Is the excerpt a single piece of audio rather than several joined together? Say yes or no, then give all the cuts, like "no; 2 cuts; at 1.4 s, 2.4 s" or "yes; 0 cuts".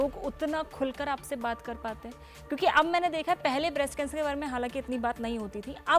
yes; 0 cuts